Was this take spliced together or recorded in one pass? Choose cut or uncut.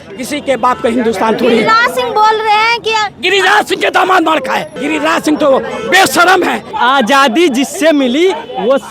cut